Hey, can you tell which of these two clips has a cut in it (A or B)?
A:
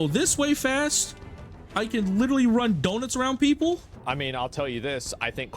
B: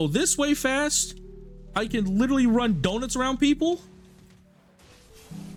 A